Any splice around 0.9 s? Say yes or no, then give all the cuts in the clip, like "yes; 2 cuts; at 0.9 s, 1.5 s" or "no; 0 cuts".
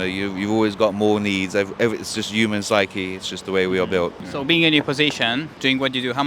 no; 1 cut; at 4.2 s